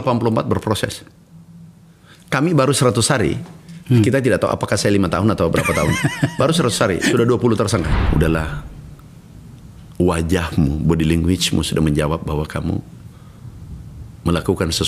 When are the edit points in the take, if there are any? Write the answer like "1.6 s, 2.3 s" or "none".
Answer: 8.0 s